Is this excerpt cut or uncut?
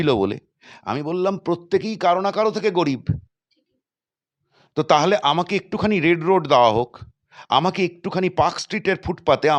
uncut